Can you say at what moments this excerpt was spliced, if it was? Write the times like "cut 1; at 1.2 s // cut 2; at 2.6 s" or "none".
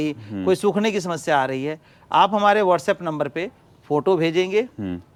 none